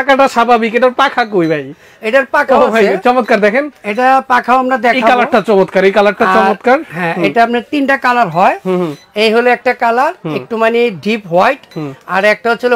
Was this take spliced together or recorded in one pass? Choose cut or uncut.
uncut